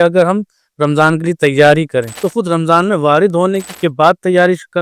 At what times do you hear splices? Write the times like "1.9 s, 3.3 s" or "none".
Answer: 2.2 s, 3.7 s